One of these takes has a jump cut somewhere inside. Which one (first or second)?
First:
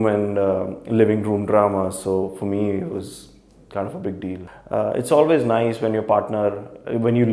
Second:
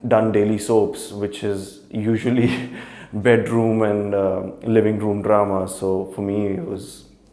first